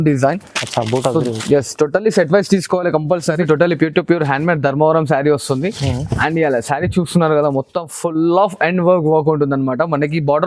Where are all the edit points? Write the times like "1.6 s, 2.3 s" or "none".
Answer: 3.3 s